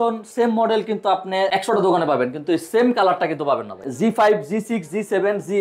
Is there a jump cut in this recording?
yes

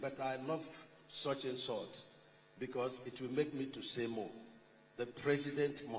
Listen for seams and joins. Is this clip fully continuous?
yes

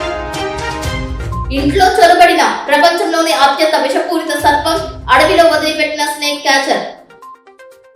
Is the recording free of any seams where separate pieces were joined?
yes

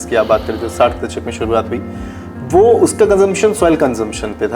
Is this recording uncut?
yes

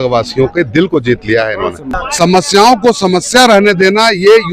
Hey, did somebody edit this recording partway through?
yes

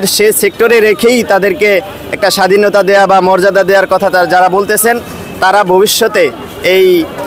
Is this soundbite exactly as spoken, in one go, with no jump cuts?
yes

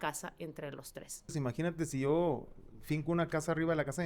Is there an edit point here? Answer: yes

